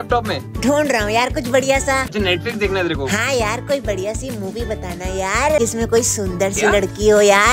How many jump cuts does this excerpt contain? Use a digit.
2